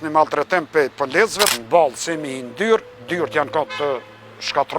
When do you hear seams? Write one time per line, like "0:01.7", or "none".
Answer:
0:01.5